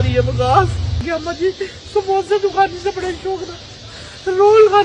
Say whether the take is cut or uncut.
cut